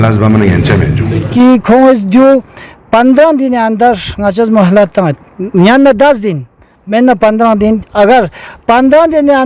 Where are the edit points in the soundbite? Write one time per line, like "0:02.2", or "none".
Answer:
0:01.3